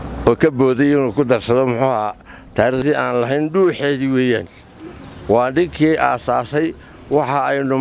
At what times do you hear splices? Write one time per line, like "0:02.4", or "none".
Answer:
0:02.8